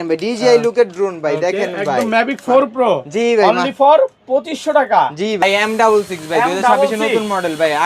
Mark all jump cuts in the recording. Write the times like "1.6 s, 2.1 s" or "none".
5.4 s